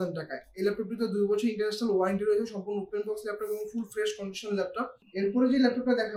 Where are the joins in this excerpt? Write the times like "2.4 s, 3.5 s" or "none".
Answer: none